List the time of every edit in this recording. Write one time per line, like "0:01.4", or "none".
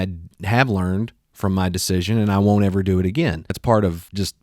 0:03.5